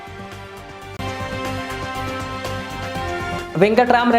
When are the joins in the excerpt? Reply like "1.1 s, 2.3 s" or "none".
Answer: 1.0 s, 3.4 s